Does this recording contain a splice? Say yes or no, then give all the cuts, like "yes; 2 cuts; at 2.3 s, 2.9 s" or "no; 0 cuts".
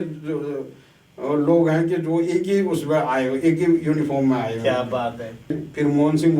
yes; 1 cut; at 5.5 s